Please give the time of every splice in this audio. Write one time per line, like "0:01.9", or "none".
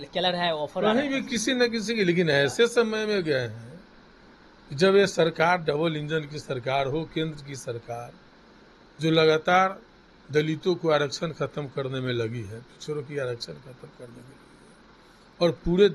none